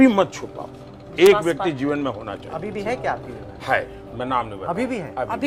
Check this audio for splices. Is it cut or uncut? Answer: uncut